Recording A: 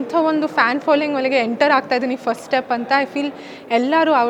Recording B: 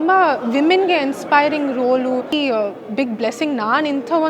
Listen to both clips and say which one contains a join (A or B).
B